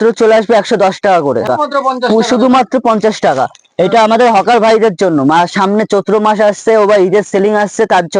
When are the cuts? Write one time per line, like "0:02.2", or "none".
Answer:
0:01.5